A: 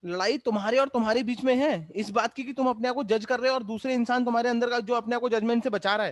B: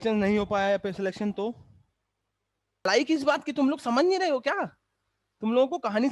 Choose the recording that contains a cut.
B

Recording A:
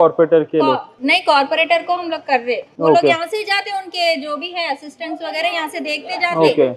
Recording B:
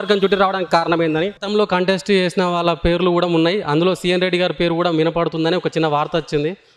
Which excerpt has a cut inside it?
B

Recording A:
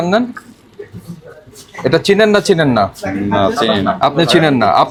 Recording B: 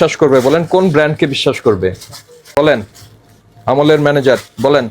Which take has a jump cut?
B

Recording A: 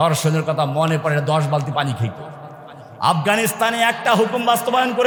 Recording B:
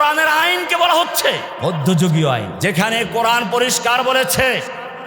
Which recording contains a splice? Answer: B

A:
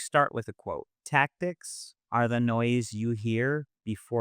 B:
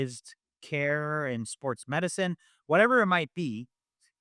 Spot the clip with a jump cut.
A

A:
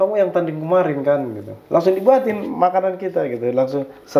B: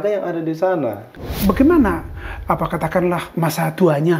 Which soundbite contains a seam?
B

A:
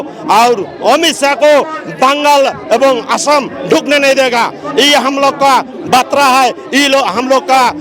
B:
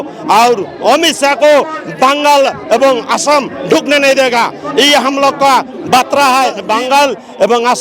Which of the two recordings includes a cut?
B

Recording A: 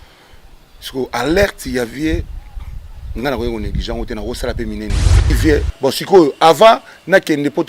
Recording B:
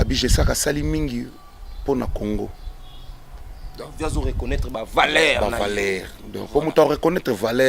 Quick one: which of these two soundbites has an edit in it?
A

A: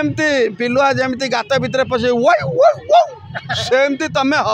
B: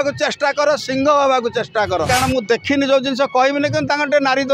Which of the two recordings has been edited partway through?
B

